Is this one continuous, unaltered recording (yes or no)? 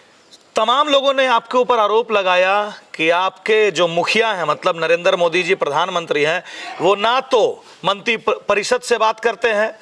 yes